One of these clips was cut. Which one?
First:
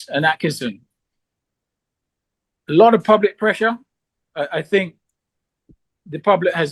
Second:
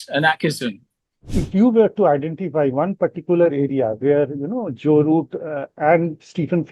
second; 1 cut; at 1.4 s

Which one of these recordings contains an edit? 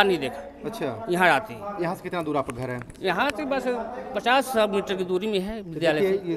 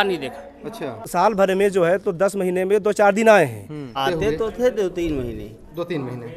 second; 2 cuts; at 1.0 s, 3.9 s

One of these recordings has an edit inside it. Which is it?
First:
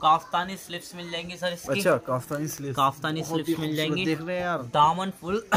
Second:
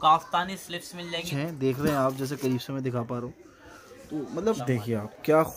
second; 2 cuts; at 1.3 s, 4.6 s

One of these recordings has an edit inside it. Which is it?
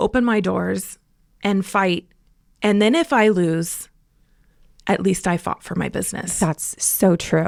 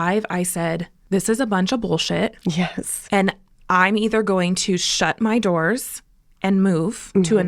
second; 1 cut; at 0.9 s

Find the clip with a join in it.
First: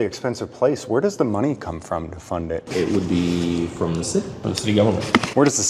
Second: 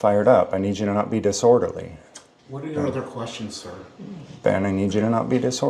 first; 2 cuts; at 2.6 s, 4.4 s

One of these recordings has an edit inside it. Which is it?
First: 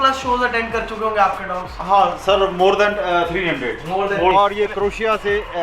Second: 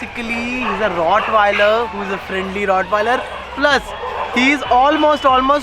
first; 1 cut; at 4.3 s

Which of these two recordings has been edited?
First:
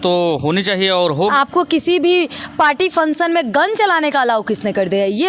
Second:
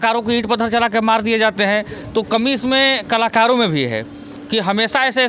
first; 1 cut; at 1.3 s

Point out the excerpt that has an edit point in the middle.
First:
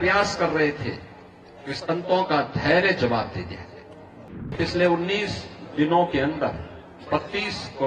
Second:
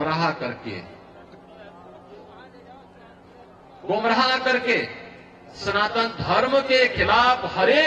first; 1 cut; at 4.2 s

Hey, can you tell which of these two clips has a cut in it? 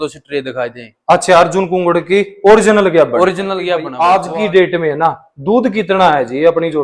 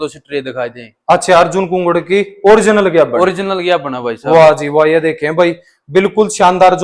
first; 1 cut; at 3.8 s

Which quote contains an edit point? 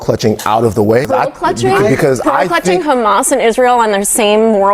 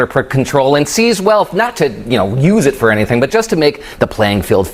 first; 1 cut; at 1.1 s

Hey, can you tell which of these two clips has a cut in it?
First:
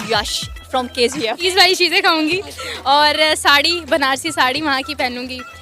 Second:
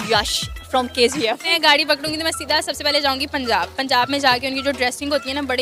first; 1 cut; at 1.4 s

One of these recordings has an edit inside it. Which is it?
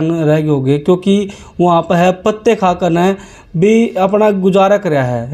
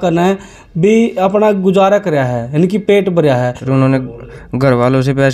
second; 1 cut; at 3.6 s

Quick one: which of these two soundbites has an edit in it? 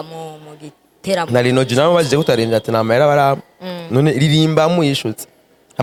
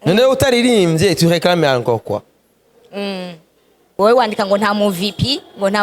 second; 1 cut; at 3.9 s

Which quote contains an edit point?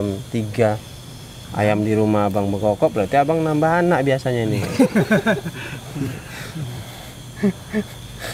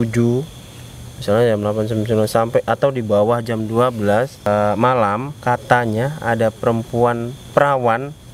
second; 3 cuts; at 4.5 s, 5.3 s, 7.4 s

